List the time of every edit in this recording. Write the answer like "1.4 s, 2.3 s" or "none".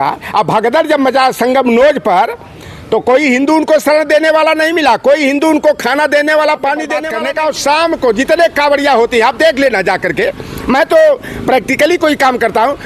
7.1 s